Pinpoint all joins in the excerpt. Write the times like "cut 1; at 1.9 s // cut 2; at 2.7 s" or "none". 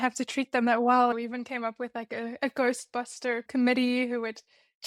cut 1; at 1.1 s // cut 2; at 3.4 s